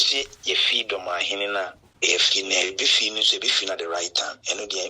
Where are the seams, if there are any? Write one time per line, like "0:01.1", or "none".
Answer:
0:01.8